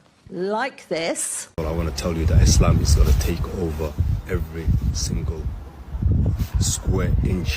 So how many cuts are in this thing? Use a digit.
1